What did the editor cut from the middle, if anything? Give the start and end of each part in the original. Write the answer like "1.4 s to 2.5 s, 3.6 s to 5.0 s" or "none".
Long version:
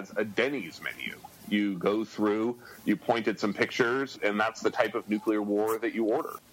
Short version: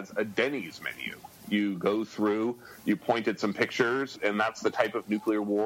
none